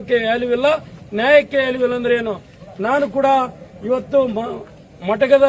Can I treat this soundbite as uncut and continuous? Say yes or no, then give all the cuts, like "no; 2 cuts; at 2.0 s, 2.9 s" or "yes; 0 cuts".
yes; 0 cuts